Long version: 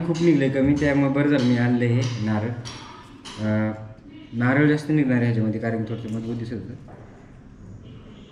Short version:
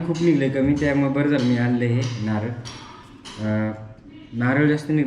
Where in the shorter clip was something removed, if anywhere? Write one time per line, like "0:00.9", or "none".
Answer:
none